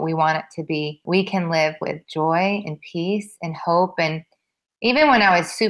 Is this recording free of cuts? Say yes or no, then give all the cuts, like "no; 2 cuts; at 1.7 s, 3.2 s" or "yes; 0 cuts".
no; 1 cut; at 1.0 s